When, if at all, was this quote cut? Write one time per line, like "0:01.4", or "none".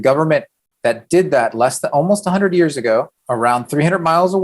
0:03.2